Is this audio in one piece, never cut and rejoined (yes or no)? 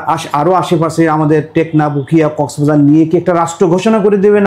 yes